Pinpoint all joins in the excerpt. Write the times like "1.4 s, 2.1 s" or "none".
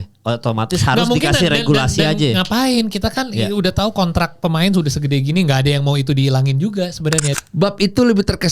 7.3 s